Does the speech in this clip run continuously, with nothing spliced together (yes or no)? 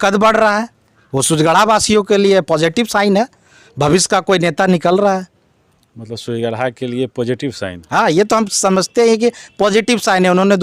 yes